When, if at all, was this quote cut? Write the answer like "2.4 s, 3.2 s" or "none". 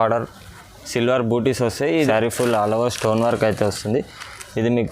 2.1 s